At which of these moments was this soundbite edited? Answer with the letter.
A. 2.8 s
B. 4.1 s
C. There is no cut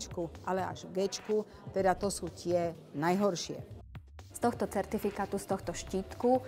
B